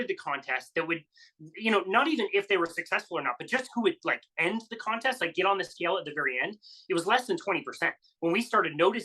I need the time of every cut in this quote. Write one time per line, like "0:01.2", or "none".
0:08.1